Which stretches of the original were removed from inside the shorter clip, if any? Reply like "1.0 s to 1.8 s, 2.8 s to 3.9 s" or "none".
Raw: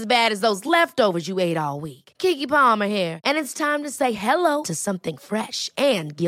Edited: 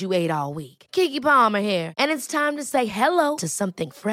none